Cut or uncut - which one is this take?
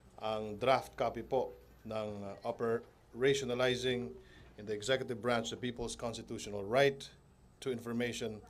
uncut